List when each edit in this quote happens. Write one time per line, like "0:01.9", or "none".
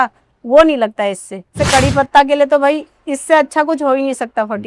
0:01.6